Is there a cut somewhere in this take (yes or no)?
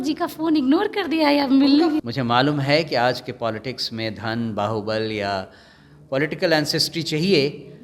yes